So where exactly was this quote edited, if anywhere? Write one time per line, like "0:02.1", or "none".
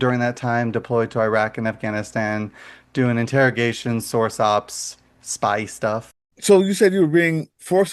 0:06.3